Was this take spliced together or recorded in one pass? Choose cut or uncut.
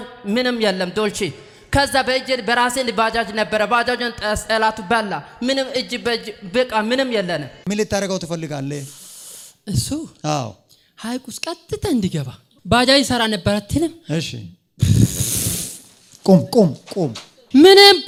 uncut